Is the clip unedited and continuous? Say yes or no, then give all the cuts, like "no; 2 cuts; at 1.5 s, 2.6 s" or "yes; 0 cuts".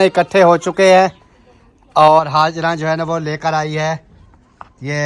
yes; 0 cuts